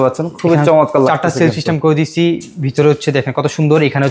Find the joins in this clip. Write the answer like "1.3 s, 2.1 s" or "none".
none